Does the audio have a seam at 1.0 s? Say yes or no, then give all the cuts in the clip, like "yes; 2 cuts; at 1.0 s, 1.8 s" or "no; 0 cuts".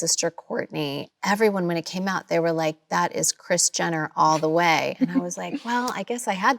yes; 1 cut; at 1.0 s